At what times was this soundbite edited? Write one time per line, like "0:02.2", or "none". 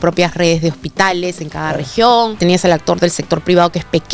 0:02.4